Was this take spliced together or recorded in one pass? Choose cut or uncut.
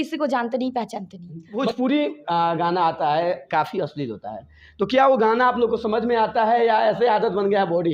cut